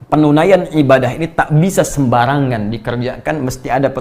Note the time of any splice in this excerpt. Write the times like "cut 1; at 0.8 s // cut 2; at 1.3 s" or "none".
none